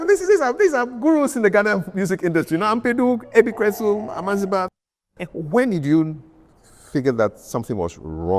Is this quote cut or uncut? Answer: cut